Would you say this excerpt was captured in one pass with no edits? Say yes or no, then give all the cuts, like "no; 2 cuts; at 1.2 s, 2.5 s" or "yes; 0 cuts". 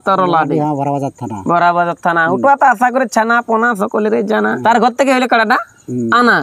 no; 1 cut; at 4.6 s